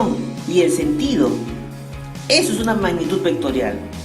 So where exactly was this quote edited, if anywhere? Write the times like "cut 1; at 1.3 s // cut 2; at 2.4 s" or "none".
cut 1; at 3.0 s